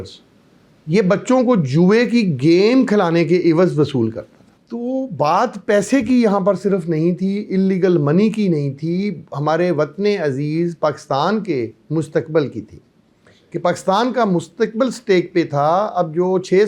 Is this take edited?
no; 0 cuts

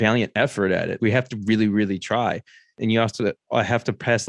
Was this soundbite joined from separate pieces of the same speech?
yes; 2 cuts; at 0.9 s, 2.6 s

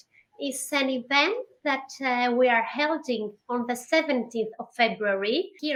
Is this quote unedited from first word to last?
yes; 0 cuts

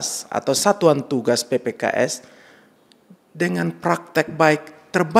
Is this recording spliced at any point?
no; 0 cuts

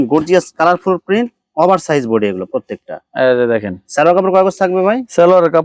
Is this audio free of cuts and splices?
yes; 0 cuts

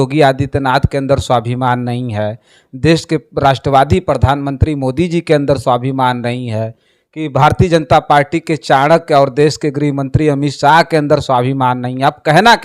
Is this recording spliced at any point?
no; 0 cuts

